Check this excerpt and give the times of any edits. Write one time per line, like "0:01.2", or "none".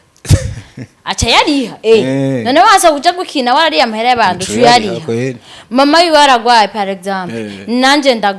none